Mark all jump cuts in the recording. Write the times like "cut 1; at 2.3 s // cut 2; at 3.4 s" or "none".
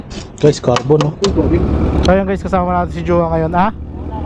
cut 1; at 1.6 s